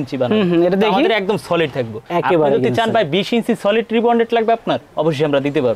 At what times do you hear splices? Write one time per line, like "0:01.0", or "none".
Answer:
none